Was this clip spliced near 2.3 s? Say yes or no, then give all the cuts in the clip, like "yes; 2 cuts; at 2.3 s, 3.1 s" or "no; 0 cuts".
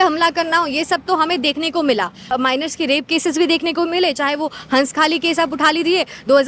yes; 1 cut; at 2.3 s